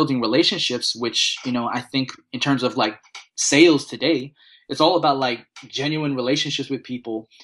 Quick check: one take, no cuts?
yes; 0 cuts

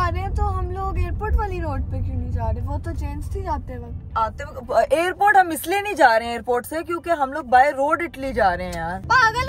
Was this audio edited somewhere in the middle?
no; 0 cuts

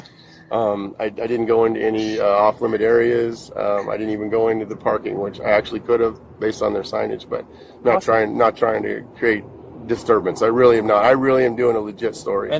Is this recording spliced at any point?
no; 0 cuts

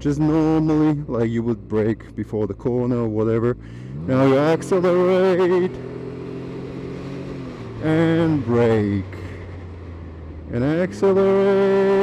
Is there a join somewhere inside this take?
no; 0 cuts

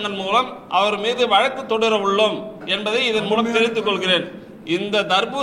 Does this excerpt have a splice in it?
no; 0 cuts

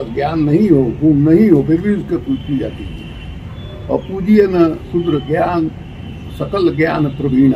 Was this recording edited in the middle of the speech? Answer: no; 0 cuts

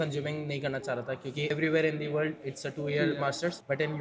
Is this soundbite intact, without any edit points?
yes; 0 cuts

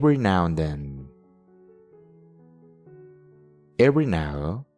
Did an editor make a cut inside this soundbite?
yes; 2 cuts; at 1.1 s, 3.7 s

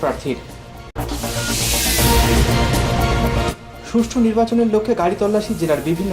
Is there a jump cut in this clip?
no; 0 cuts

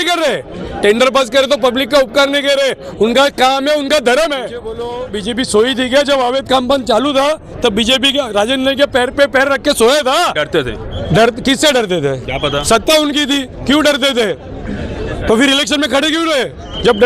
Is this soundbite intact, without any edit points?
no; 1 cut; at 4.9 s

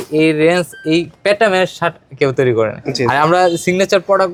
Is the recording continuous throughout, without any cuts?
yes; 0 cuts

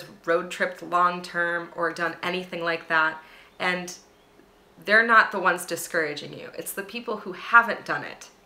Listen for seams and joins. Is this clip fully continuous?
yes; 0 cuts

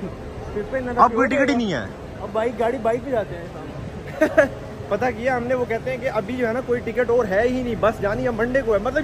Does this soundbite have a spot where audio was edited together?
no; 0 cuts

